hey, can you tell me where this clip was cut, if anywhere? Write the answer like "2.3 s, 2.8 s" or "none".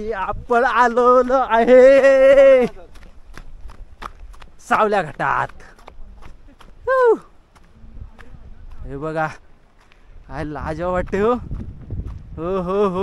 none